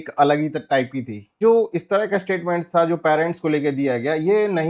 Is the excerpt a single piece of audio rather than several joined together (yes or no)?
no